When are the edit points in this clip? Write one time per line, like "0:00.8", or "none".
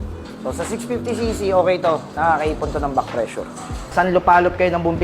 0:03.9